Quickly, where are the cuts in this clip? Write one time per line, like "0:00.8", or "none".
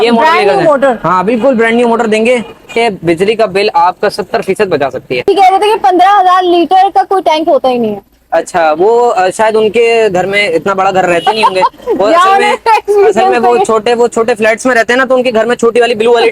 0:02.8
0:05.3